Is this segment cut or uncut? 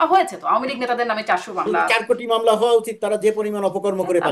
cut